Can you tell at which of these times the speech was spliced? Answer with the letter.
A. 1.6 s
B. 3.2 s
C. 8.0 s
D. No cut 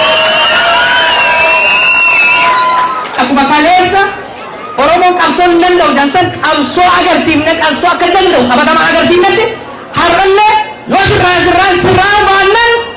B